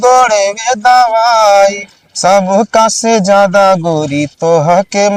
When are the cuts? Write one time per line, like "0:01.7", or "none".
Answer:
none